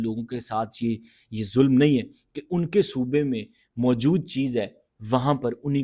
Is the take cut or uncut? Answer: uncut